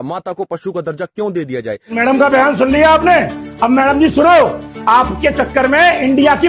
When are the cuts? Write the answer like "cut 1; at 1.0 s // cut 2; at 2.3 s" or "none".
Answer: cut 1; at 2.0 s